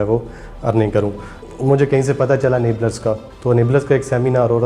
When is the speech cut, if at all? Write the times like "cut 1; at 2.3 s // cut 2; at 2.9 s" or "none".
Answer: cut 1; at 1.4 s // cut 2; at 3.3 s